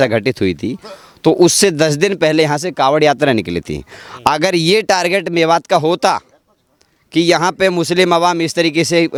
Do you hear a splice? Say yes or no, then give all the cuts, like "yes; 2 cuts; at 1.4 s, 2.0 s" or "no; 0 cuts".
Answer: no; 0 cuts